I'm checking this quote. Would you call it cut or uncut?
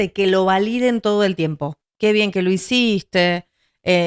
uncut